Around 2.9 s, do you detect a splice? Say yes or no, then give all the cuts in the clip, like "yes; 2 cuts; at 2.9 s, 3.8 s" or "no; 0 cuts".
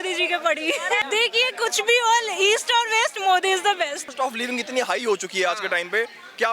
no; 2 cuts; at 1.0 s, 4.1 s